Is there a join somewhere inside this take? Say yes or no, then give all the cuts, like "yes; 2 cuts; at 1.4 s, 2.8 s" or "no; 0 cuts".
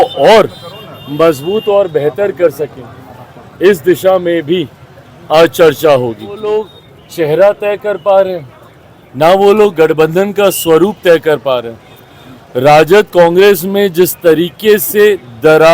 yes; 1 cut; at 6.4 s